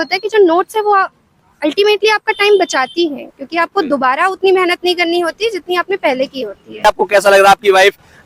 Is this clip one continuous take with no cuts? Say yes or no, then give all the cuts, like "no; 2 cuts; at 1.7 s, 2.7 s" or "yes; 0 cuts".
no; 1 cut; at 6.8 s